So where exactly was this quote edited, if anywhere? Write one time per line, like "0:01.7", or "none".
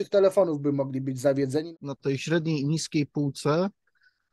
0:01.7